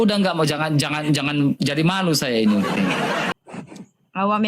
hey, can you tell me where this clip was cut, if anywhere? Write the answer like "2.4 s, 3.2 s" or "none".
3.3 s

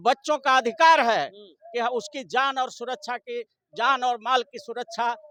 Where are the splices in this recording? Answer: none

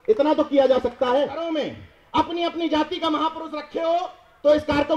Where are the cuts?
1.4 s

